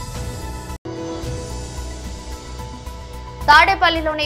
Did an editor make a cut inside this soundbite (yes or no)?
no